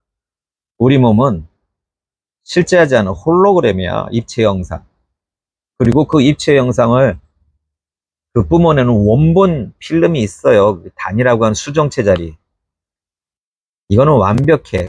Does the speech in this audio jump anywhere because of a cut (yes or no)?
no